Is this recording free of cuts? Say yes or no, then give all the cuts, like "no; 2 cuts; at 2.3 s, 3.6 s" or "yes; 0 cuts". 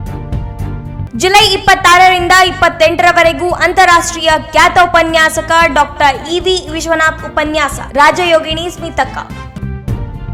yes; 0 cuts